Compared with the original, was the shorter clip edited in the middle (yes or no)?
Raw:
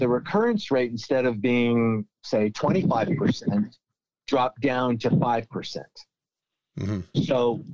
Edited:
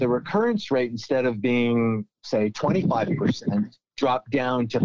yes